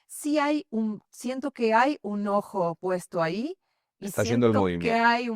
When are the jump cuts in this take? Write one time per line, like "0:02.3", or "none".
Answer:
none